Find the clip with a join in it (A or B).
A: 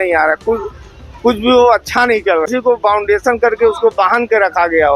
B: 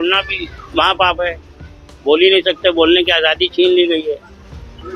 A